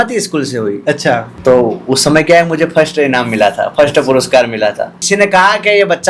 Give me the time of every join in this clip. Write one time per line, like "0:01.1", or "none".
0:01.3
0:05.0